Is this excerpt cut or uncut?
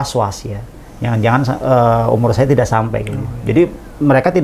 uncut